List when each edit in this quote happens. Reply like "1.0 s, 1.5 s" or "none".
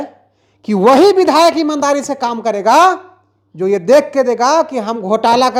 none